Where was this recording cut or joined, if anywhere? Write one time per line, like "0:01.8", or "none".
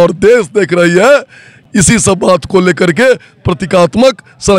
none